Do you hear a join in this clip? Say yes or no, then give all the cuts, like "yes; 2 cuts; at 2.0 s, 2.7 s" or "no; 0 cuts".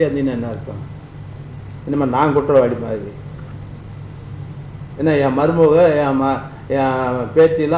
no; 0 cuts